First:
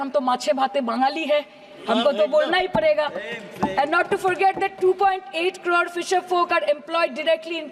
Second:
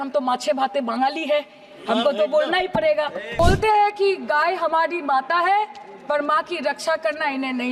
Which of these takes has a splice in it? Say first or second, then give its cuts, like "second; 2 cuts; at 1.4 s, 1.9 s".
second; 1 cut; at 3.4 s